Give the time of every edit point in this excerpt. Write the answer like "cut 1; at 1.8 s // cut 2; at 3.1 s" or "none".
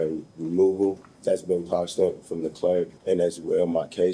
cut 1; at 1.1 s // cut 2; at 3.0 s